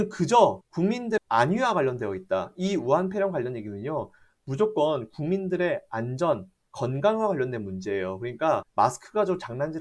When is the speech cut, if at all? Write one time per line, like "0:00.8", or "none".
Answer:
none